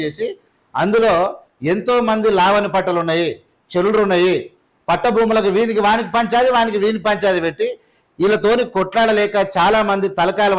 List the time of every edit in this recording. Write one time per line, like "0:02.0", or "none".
none

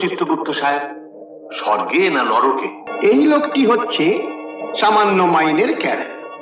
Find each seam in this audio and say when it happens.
0:02.8

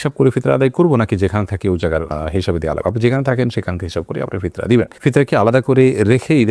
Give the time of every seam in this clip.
none

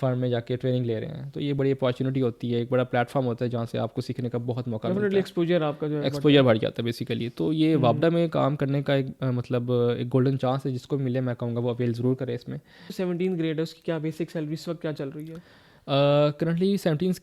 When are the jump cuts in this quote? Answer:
0:13.0

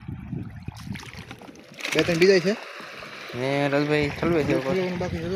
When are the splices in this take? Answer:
0:01.1

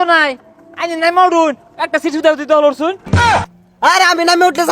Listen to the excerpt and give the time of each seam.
0:03.3

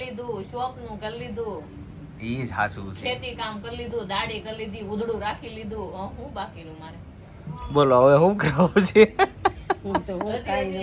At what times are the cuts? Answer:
none

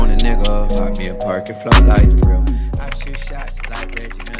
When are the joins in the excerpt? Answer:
none

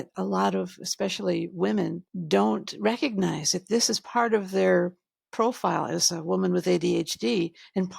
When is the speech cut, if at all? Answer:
0:02.1

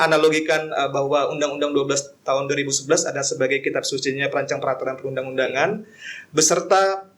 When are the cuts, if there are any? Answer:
none

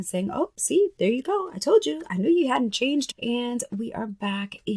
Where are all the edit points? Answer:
0:03.1

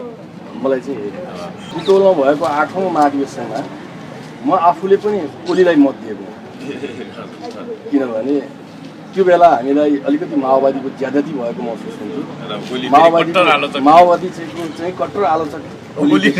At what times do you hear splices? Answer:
0:01.6

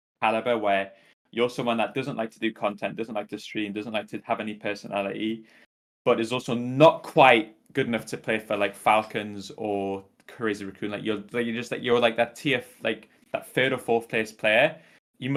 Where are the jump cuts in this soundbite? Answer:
none

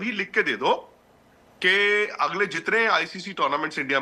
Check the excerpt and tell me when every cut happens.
none

